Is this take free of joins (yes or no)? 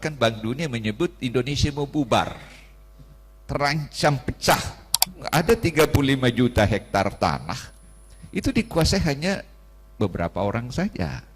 no